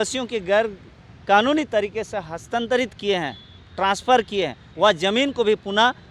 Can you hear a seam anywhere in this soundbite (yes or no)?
no